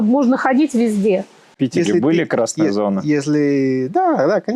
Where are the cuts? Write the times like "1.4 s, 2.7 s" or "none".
1.4 s

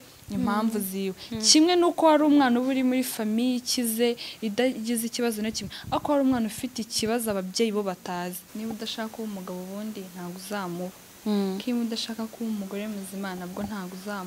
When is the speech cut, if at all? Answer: 8.4 s

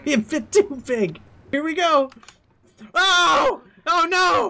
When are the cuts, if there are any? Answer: 1.4 s

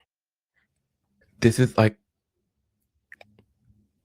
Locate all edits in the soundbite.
1.1 s

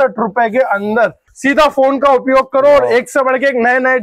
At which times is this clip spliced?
1.3 s

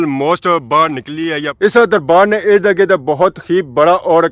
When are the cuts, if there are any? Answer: 1.4 s

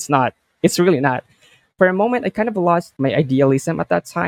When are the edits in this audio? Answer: 2.9 s

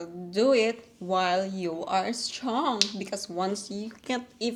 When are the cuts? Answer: none

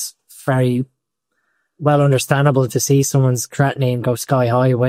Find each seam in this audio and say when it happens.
none

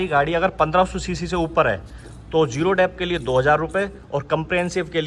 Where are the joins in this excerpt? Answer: none

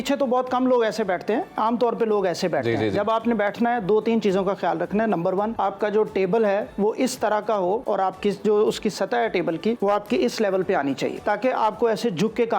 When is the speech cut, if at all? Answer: 5.5 s, 7.8 s, 9.8 s, 11.2 s

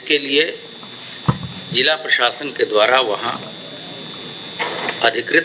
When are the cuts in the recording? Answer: none

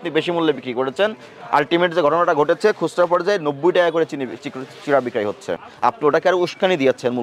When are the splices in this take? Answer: 5.7 s

